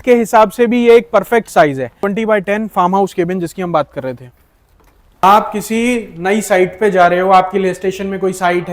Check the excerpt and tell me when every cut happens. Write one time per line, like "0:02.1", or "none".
0:02.0
0:05.2